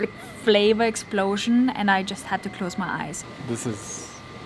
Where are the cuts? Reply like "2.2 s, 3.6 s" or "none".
3.2 s